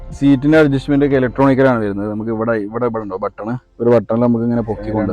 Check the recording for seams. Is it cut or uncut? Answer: uncut